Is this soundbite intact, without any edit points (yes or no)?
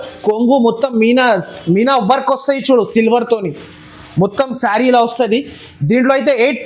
yes